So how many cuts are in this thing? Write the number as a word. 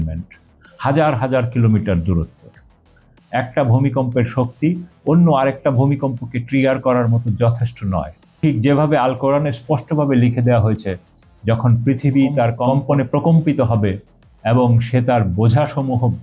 one